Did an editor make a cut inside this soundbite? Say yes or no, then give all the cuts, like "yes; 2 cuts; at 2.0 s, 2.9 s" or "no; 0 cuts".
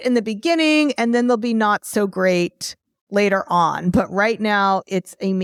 no; 0 cuts